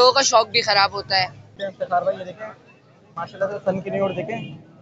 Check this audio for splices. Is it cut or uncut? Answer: cut